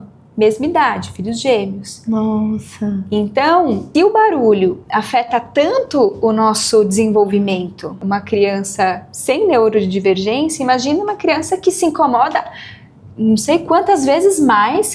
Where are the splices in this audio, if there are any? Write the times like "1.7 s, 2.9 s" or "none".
3.8 s, 8.0 s